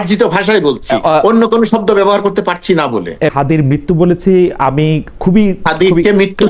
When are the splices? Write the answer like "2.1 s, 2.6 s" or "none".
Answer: 3.3 s